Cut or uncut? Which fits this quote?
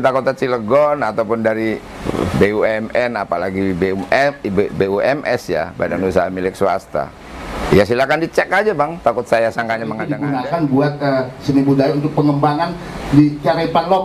cut